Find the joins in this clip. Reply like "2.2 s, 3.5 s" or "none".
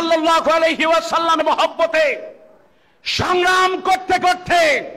1.4 s